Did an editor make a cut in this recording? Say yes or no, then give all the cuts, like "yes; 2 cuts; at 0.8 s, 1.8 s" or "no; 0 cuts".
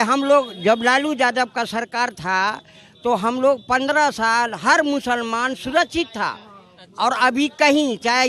no; 0 cuts